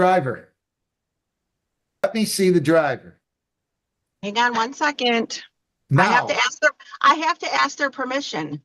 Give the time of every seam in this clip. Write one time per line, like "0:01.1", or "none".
0:02.0